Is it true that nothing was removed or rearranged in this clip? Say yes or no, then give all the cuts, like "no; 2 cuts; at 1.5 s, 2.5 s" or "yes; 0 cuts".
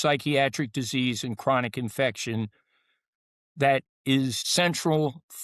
yes; 0 cuts